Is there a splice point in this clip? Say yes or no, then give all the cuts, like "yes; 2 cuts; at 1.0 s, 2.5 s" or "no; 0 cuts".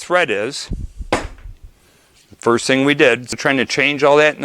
yes; 1 cut; at 3.4 s